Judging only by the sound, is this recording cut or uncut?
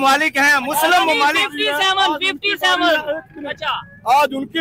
uncut